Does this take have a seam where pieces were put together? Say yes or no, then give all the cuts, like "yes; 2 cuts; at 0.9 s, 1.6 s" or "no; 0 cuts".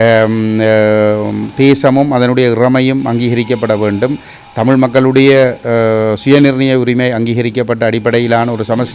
no; 0 cuts